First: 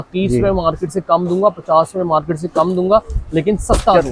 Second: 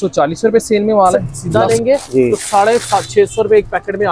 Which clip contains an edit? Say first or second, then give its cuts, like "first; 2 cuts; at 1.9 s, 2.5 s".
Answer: second; 1 cut; at 1.3 s